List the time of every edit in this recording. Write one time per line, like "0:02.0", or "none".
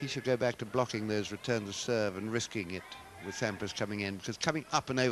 0:04.0